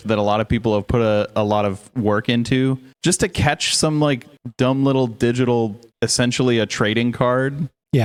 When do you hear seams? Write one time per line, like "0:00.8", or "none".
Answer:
none